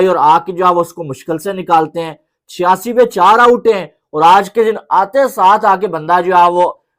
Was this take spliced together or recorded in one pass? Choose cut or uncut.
uncut